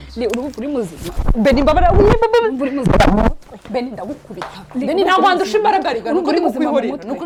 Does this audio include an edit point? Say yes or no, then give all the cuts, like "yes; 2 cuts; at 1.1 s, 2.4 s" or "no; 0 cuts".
no; 0 cuts